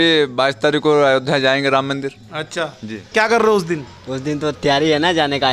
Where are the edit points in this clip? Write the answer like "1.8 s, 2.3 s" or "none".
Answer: 3.1 s